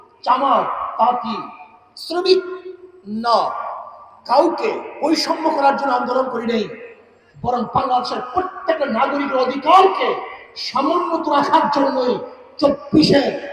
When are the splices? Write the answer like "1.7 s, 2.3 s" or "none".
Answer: none